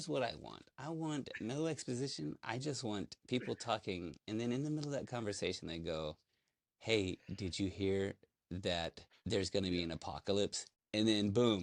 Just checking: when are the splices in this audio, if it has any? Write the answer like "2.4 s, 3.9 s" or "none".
none